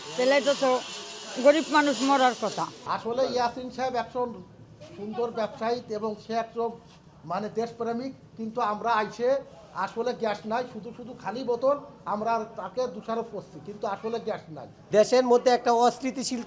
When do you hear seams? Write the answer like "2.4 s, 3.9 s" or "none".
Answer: 2.8 s, 14.8 s